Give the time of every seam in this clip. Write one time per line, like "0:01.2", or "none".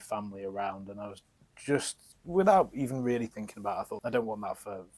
0:03.9